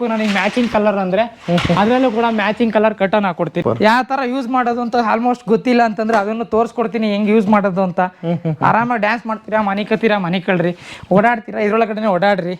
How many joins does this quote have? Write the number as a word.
one